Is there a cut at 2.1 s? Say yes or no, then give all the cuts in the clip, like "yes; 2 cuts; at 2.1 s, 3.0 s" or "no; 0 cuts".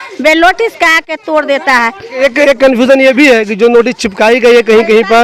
no; 0 cuts